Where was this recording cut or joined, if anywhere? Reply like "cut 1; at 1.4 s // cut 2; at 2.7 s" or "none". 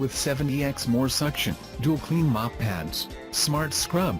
cut 1; at 2.8 s